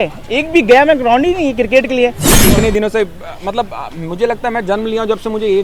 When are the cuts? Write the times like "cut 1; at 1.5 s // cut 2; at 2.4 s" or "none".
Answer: cut 1; at 2.4 s